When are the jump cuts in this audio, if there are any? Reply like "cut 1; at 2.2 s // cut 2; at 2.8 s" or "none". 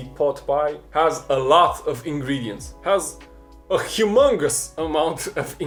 none